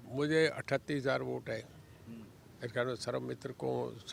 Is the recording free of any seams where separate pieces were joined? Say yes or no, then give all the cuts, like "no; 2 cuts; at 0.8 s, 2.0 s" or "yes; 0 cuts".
yes; 0 cuts